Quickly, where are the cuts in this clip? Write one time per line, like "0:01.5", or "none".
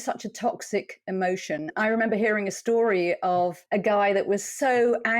0:01.7
0:03.6

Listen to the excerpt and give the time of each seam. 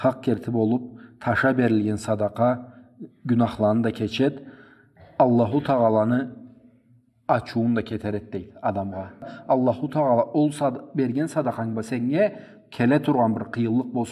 0:09.3

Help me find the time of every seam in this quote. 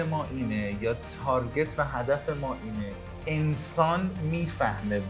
0:03.1

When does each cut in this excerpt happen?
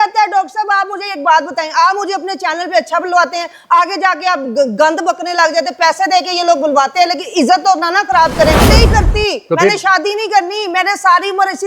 0:08.7

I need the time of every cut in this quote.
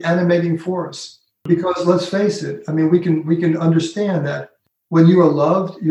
0:01.5

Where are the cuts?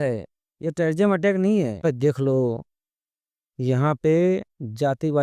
0:01.8

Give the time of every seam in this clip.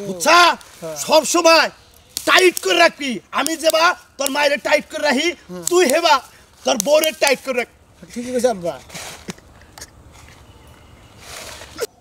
none

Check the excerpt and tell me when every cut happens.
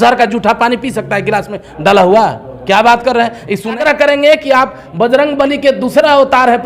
0:03.8

